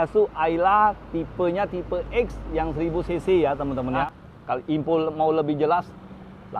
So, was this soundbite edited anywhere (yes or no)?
yes